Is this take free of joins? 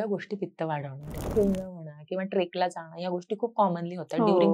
no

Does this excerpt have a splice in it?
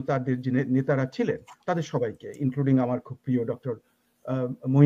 no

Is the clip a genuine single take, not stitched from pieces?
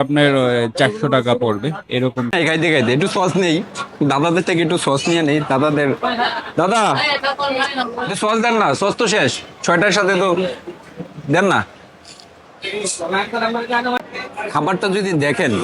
no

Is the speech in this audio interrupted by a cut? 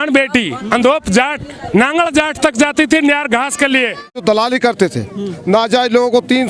yes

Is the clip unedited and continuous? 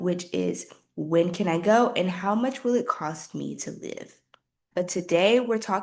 no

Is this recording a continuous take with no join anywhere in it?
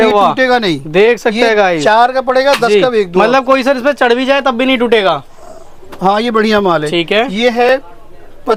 yes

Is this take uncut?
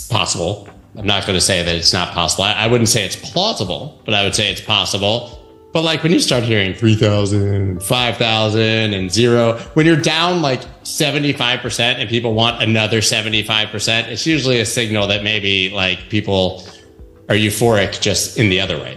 yes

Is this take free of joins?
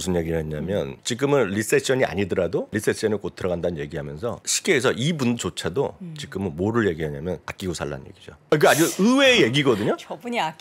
no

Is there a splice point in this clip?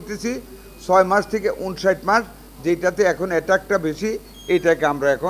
no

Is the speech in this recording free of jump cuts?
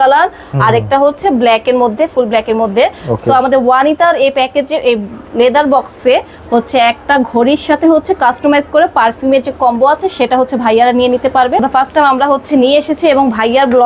no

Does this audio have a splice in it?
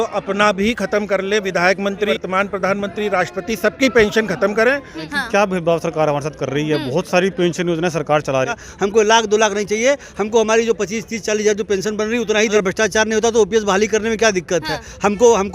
yes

